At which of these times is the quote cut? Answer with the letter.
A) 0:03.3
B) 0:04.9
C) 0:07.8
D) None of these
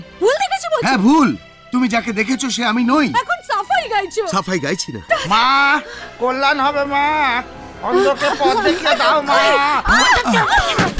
B